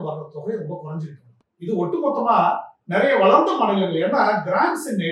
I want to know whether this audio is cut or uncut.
uncut